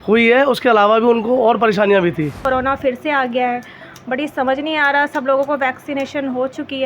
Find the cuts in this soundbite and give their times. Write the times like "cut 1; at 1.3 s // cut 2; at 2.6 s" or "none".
cut 1; at 2.3 s